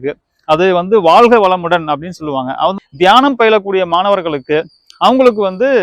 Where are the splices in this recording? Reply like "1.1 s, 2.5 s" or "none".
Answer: 2.8 s